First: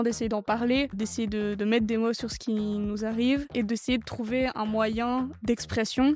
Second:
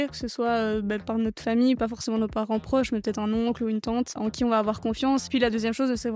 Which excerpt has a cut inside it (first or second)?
second